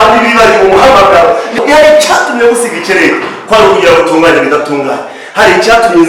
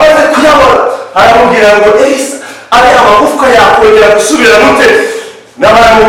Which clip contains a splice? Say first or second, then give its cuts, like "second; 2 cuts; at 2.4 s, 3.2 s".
first; 1 cut; at 1.6 s